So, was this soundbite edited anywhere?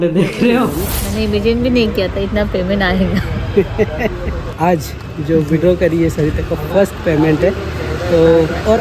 yes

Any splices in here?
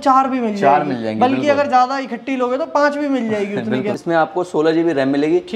yes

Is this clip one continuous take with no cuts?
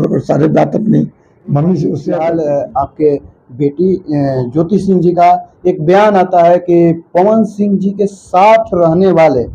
no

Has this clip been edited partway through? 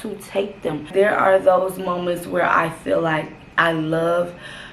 yes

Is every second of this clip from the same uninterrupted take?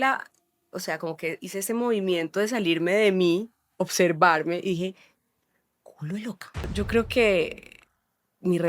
no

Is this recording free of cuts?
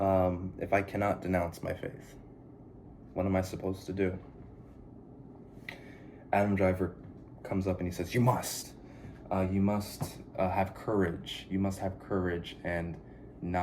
no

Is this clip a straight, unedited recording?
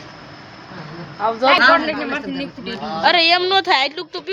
no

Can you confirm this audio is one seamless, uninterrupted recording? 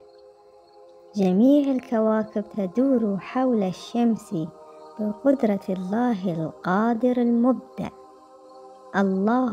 yes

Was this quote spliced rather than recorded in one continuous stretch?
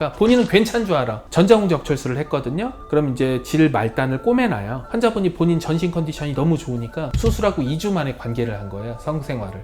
yes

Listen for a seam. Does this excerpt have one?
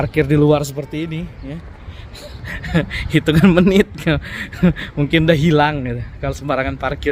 no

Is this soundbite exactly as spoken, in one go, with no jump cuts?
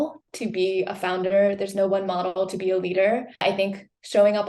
no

